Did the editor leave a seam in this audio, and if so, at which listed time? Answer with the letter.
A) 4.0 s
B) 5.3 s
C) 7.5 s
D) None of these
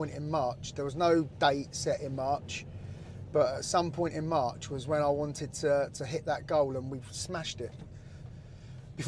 D